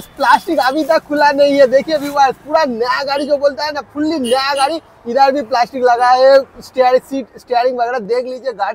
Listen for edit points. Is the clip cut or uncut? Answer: uncut